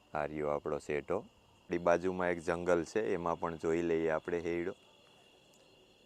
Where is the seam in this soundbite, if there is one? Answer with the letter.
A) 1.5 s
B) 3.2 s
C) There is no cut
C